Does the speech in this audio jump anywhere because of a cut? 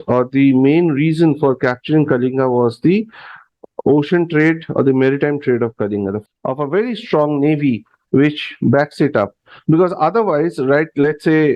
yes; 1 cut; at 6.2 s

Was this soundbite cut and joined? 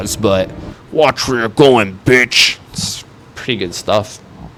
no; 0 cuts

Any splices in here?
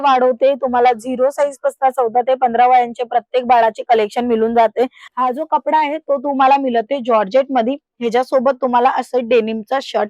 yes; 1 cut; at 5.0 s

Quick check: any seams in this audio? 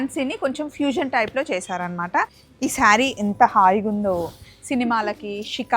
yes; 1 cut; at 2.4 s

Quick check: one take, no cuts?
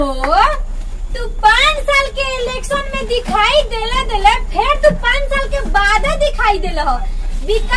yes; 0 cuts

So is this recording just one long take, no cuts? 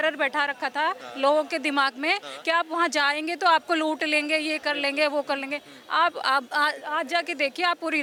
yes; 0 cuts

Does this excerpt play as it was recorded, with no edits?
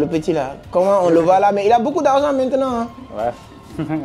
yes; 0 cuts

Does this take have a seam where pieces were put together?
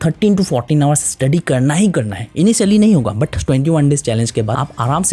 no; 0 cuts

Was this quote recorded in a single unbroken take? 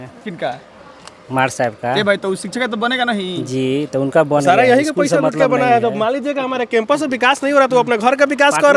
yes; 0 cuts

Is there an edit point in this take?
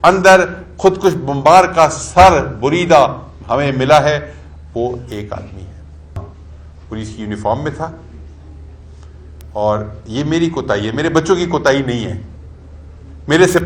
yes; 1 cut; at 6.2 s

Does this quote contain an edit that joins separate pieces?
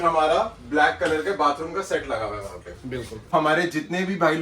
yes; 1 cut; at 3.3 s

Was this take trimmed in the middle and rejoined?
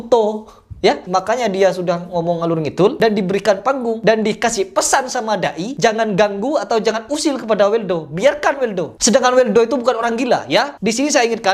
yes; 2 cuts; at 1.0 s, 3.0 s

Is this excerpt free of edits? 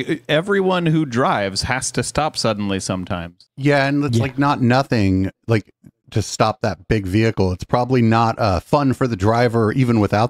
yes; 0 cuts

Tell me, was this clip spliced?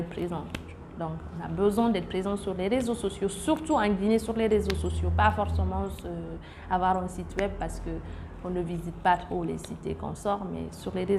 no; 0 cuts

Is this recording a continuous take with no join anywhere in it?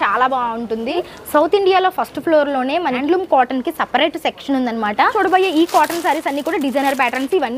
no; 3 cuts; at 1.0 s, 3.0 s, 5.1 s

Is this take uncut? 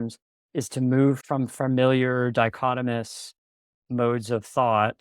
no; 1 cut; at 1.2 s

